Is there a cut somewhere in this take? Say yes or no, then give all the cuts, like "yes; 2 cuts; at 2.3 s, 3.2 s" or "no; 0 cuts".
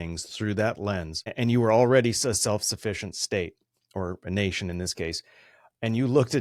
no; 0 cuts